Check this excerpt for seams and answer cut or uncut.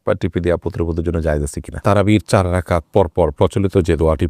cut